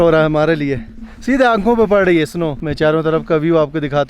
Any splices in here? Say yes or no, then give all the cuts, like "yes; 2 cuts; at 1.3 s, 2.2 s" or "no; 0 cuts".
yes; 1 cut; at 2.6 s